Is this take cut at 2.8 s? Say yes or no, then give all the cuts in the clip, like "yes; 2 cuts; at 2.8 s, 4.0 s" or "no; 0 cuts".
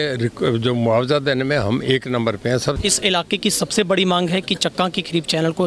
yes; 1 cut; at 2.8 s